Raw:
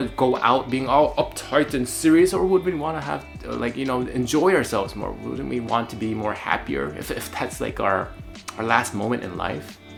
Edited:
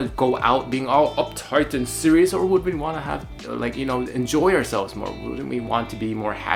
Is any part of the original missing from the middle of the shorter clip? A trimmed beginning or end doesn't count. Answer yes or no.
no